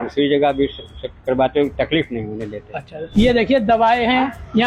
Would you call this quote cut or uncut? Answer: cut